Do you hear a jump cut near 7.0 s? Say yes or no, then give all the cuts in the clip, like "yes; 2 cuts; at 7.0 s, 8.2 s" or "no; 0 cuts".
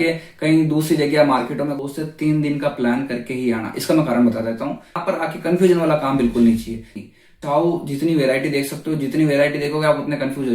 yes; 3 cuts; at 1.8 s, 5.1 s, 7.0 s